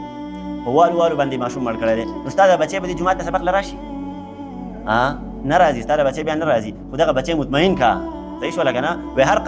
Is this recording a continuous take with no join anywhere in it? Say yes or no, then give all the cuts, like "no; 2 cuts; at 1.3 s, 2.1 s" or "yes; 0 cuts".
yes; 0 cuts